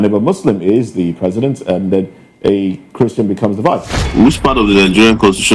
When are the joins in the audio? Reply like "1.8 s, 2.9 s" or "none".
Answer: 4.1 s